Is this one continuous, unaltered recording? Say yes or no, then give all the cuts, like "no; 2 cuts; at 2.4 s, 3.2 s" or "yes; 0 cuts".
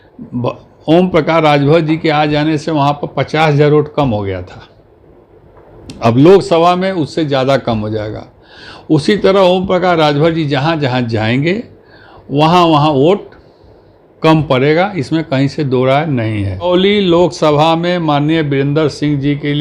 no; 1 cut; at 16.7 s